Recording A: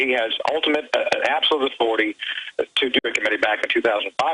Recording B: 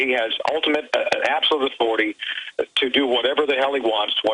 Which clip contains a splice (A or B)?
B